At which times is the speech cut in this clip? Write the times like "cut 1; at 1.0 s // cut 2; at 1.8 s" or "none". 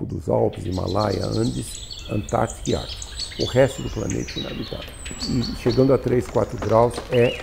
cut 1; at 5.2 s